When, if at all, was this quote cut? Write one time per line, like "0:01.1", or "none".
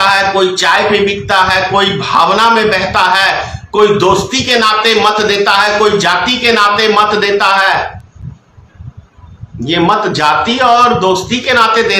none